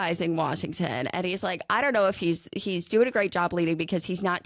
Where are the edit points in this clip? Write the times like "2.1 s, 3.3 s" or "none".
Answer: none